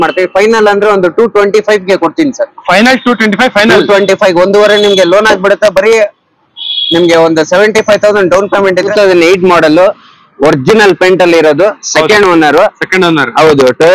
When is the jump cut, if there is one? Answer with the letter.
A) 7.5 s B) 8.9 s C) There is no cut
B